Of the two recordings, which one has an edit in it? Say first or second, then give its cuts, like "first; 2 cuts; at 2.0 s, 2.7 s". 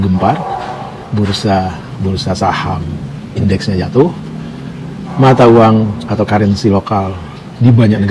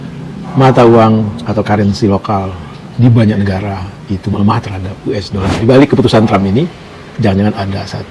second; 1 cut; at 5.5 s